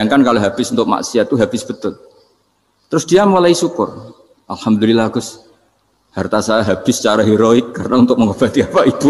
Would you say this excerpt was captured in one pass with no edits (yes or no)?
yes